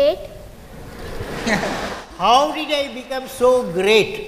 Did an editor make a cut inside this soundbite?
no; 0 cuts

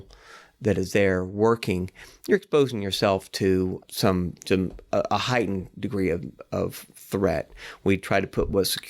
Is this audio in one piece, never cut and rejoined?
yes; 0 cuts

